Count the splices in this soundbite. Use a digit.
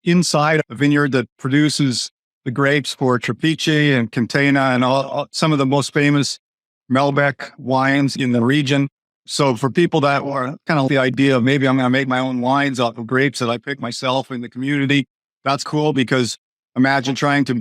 1